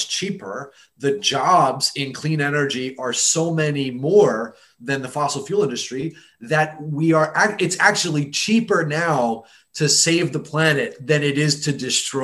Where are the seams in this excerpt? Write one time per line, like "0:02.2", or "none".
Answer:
none